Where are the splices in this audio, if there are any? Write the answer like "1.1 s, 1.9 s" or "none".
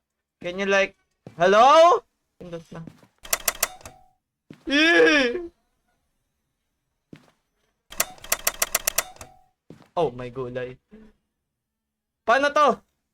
2.2 s